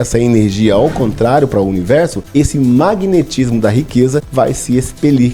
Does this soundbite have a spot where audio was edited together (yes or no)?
yes